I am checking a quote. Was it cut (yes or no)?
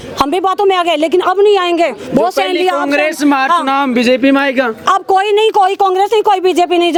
no